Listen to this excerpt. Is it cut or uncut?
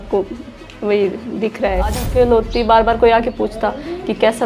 cut